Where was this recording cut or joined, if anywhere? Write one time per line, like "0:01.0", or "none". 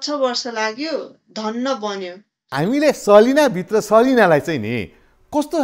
0:02.4